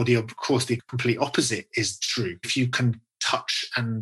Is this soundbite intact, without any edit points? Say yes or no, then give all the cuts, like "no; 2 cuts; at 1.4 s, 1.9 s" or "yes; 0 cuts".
no; 2 cuts; at 0.9 s, 2.5 s